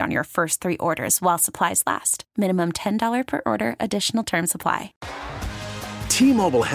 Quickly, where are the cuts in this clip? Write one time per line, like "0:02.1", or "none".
0:05.0